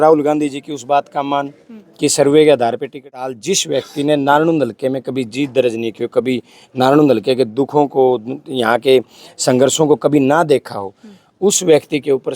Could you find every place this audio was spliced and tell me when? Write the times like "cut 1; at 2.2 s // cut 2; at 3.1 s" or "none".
cut 1; at 3.4 s